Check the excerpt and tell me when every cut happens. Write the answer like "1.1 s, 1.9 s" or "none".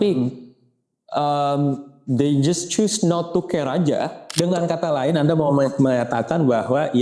4.3 s